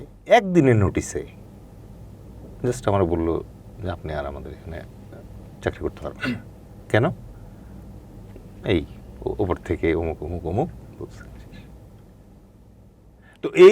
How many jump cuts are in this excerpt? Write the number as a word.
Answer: zero